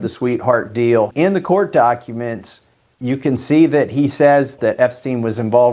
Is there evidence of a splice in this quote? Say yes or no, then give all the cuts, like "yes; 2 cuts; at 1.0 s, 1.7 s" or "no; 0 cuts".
yes; 2 cuts; at 1.1 s, 4.6 s